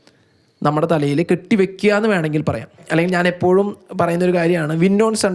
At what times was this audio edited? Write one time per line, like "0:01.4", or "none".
0:02.8